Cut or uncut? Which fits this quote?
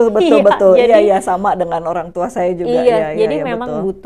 uncut